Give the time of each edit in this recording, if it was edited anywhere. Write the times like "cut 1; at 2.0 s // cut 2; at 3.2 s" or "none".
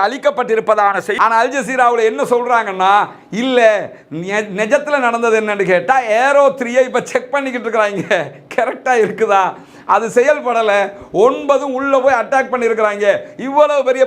cut 1; at 1.1 s